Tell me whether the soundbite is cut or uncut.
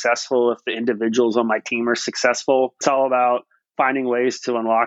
cut